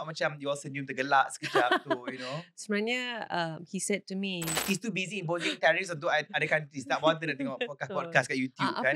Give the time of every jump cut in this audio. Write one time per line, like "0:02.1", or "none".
0:04.6

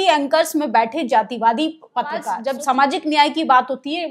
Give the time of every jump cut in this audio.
0:02.4

